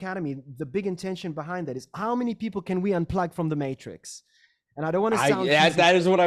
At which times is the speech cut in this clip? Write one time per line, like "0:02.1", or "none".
none